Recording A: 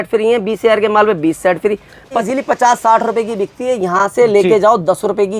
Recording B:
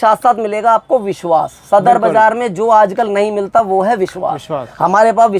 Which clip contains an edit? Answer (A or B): A